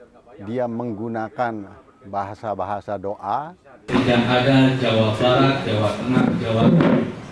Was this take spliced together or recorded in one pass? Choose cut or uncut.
cut